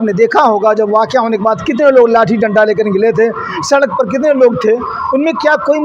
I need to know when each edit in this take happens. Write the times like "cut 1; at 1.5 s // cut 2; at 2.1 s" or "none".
none